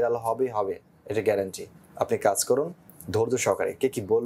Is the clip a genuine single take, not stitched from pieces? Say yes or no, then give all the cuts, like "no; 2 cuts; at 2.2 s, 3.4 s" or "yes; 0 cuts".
yes; 0 cuts